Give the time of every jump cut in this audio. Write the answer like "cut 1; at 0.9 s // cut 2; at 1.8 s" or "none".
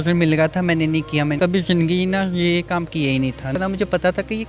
cut 1; at 1.4 s // cut 2; at 3.6 s